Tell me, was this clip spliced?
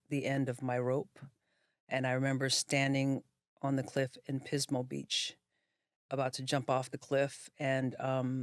no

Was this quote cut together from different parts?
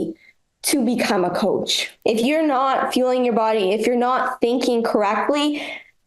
yes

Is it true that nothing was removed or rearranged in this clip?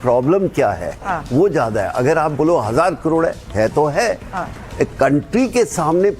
yes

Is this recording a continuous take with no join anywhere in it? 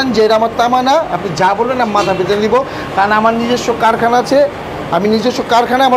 yes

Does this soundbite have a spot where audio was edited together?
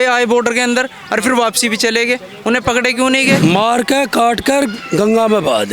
yes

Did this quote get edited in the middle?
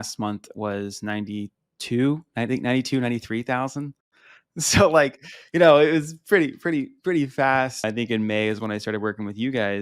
yes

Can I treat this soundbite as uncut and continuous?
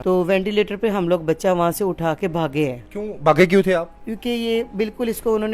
no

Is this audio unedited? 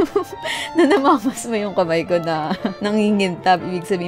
no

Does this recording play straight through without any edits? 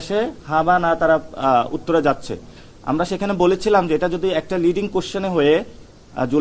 yes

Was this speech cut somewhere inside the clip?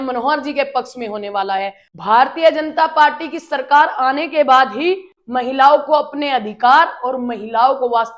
yes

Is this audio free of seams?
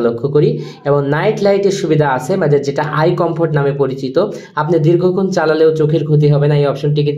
yes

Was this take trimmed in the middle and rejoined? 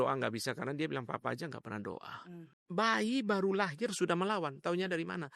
yes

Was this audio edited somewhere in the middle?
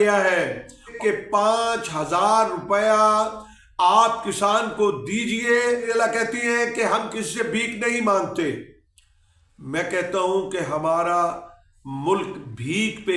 yes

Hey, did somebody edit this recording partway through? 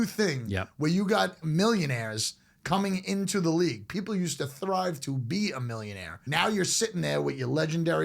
yes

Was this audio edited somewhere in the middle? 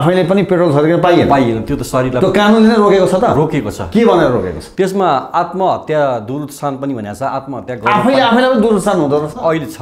no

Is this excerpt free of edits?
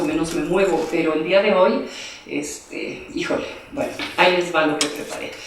no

